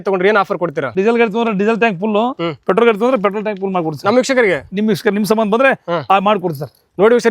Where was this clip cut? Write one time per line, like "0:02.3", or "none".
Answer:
0:00.9